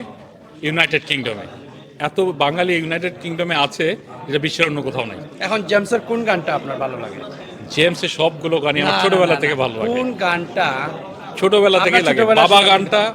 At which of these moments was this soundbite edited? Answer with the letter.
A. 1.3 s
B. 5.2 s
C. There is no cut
C